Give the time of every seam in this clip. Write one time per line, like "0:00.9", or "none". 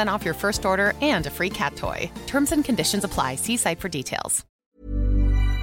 0:04.6

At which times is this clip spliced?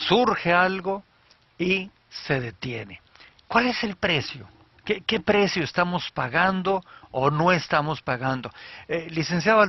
0:02.3

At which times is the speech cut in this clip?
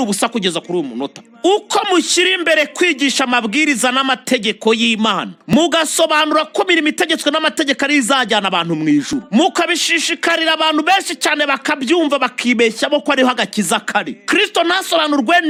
none

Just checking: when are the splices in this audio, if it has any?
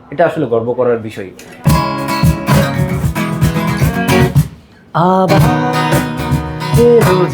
0:01.6

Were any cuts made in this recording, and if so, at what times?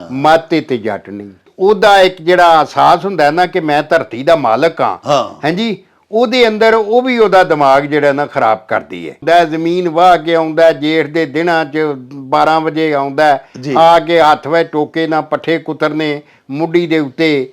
0:01.5
0:09.2

